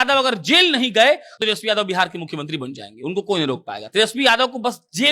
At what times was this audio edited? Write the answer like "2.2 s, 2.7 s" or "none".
1.3 s